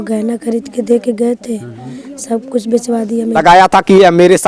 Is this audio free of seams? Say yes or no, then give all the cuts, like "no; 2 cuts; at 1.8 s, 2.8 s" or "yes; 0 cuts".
no; 1 cut; at 3.4 s